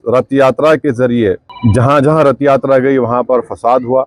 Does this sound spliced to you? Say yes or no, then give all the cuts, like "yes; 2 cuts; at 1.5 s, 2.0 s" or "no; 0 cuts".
yes; 1 cut; at 1.5 s